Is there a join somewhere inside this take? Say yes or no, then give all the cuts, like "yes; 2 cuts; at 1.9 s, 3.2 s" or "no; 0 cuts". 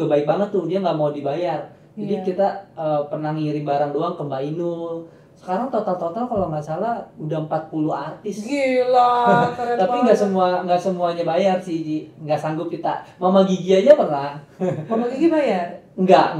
no; 0 cuts